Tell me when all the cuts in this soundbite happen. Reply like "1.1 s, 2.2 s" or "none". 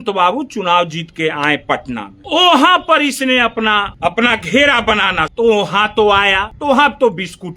2.1 s, 3.8 s, 5.3 s, 6.5 s

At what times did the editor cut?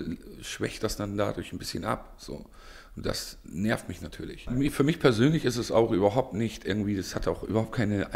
4.4 s

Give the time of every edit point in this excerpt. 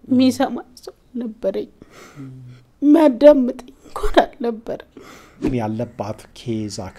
5.5 s

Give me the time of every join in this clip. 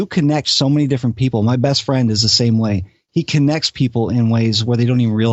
none

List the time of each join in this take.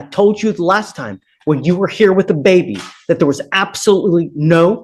none

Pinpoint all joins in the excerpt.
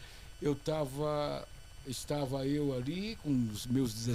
none

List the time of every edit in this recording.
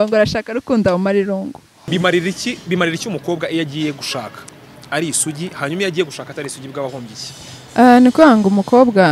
1.8 s

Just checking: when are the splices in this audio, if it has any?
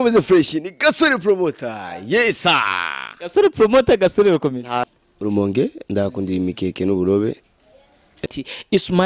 4.9 s, 8.2 s

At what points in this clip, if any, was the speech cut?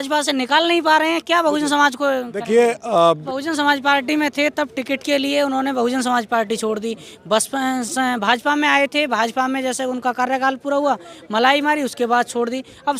3.2 s

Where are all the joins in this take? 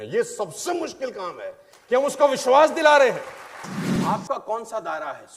3.9 s

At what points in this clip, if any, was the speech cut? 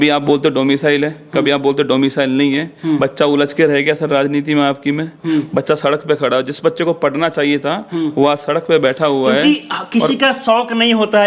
none

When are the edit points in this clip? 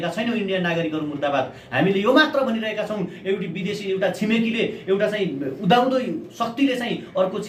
none

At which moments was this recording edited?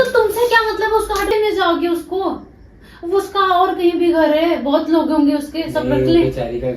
1.3 s

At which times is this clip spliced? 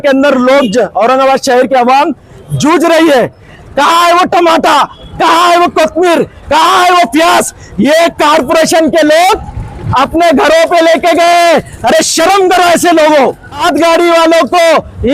3.5 s, 13.6 s

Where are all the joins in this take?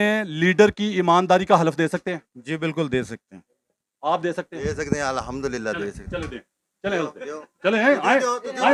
none

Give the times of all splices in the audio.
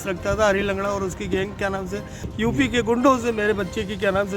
2.2 s

